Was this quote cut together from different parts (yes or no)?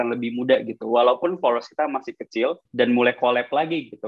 yes